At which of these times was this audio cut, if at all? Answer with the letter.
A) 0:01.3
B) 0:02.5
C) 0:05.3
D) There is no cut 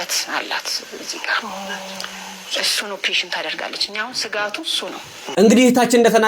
C